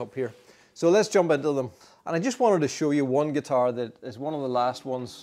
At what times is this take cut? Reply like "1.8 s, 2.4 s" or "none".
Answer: 1.8 s